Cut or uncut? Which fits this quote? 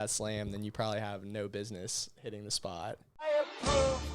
cut